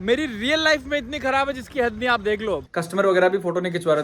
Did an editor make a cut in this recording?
yes; 1 cut; at 2.7 s

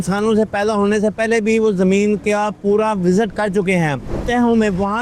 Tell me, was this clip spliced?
yes; 1 cut; at 4.1 s

